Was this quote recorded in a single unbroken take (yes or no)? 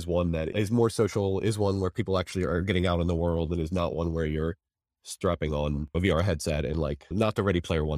yes